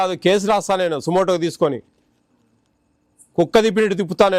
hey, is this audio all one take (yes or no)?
yes